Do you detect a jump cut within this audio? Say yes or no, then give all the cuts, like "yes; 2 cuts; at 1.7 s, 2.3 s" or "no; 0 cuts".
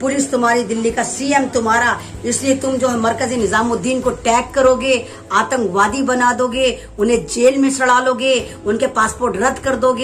no; 0 cuts